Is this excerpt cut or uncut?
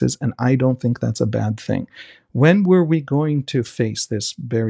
uncut